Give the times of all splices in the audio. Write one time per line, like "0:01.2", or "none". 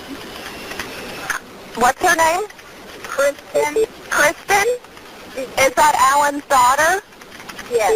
none